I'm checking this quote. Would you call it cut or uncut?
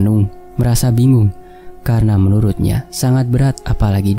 uncut